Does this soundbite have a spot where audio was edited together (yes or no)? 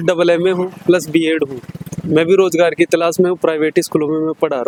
no